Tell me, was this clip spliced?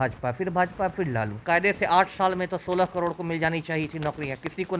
yes; 1 cut; at 1.4 s

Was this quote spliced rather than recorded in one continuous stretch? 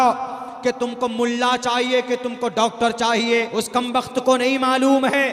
yes; 1 cut; at 3.6 s

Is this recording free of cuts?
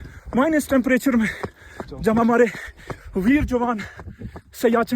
yes; 0 cuts

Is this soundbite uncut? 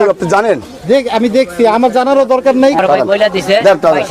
no; 1 cut; at 2.8 s

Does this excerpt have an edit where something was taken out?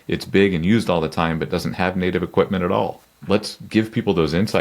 yes; 1 cut; at 3.1 s

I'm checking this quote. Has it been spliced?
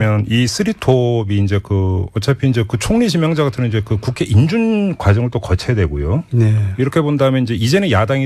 no; 0 cuts

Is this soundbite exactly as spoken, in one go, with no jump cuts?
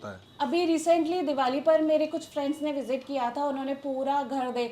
yes; 0 cuts

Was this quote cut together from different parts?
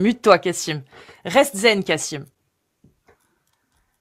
no; 0 cuts

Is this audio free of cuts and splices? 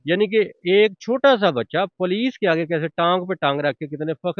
yes; 0 cuts

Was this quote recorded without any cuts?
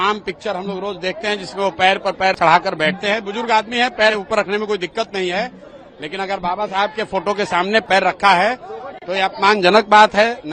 yes; 0 cuts

